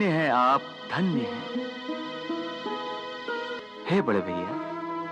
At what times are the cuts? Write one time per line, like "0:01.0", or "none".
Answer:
0:03.6